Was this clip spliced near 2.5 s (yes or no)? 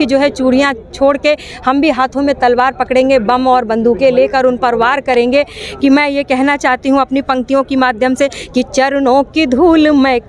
no